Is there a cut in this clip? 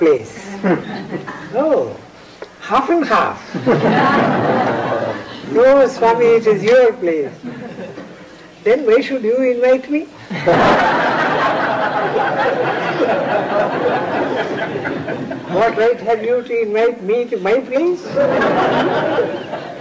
yes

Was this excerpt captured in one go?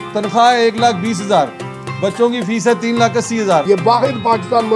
no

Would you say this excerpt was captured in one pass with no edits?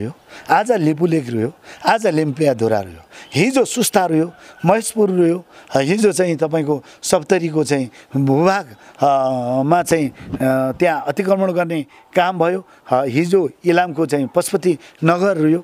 yes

